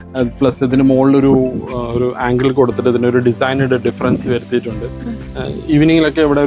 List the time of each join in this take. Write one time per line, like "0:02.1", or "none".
none